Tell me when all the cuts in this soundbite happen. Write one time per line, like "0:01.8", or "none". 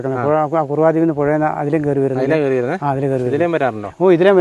none